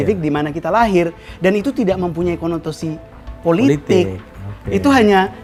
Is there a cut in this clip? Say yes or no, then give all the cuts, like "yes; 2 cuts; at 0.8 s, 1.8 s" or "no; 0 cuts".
no; 0 cuts